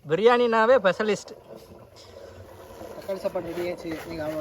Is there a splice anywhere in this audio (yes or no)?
yes